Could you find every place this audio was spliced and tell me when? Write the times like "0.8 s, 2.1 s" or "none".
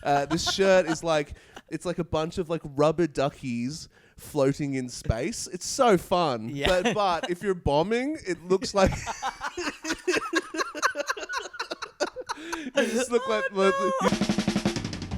14.1 s